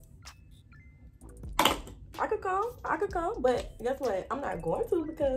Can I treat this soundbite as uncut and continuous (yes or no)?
yes